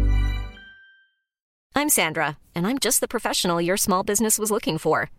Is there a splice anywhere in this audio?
yes; 1 cut; at 1.6 s

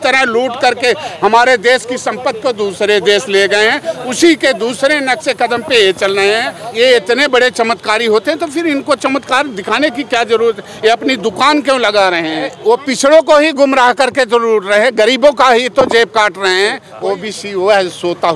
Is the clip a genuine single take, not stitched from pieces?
no; 3 cuts; at 6.6 s, 12.5 s, 16.9 s

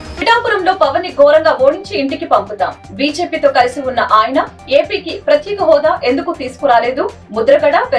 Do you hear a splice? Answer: no; 0 cuts

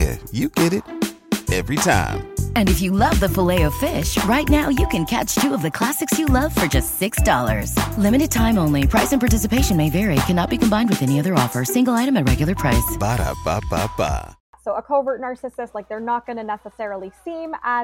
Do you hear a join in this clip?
yes; 1 cut; at 14.5 s

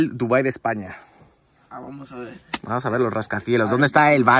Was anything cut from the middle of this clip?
no; 0 cuts

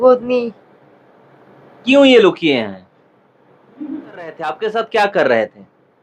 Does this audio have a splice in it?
yes; 1 cut; at 4.5 s

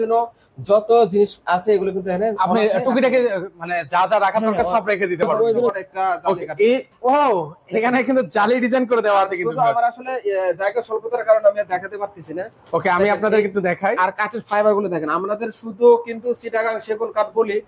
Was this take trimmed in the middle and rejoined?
yes; 1 cut; at 5.7 s

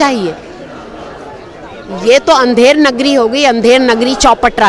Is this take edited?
no; 0 cuts

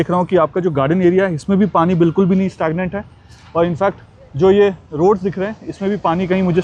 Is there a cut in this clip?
no; 0 cuts

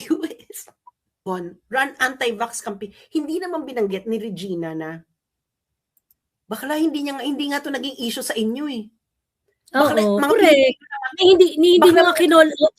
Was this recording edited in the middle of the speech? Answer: yes; 1 cut; at 1.2 s

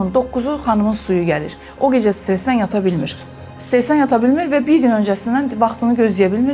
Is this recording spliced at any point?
no; 0 cuts

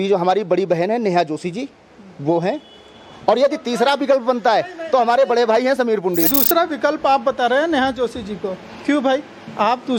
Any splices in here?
yes; 1 cut; at 6.3 s

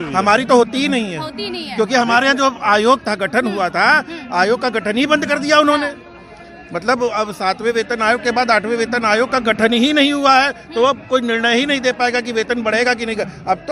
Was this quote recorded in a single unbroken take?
yes; 0 cuts

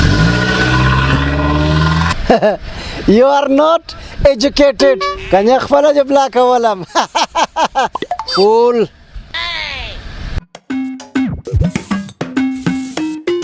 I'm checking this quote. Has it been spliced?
no; 0 cuts

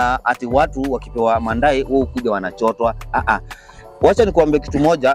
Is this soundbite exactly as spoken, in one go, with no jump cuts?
yes; 0 cuts

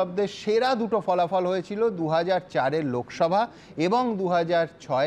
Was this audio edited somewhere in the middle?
no; 0 cuts

